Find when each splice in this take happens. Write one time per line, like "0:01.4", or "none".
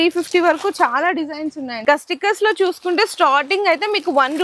0:01.8

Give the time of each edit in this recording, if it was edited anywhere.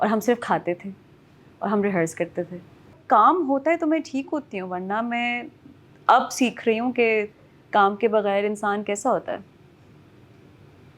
0:03.0

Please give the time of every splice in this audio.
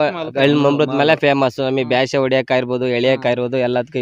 none

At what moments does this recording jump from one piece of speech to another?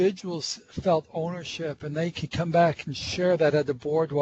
none

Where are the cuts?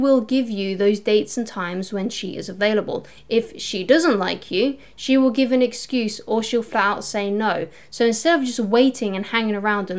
none

